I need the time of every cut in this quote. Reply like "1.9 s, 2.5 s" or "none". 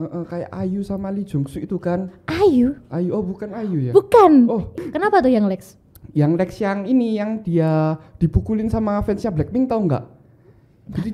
4.7 s